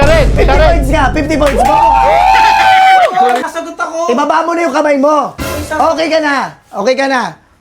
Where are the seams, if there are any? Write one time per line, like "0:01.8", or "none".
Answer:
0:03.5